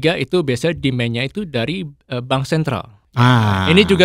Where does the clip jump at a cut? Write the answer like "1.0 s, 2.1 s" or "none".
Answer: 2.0 s, 3.0 s